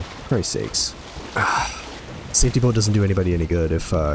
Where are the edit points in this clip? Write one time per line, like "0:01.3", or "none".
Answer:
0:02.0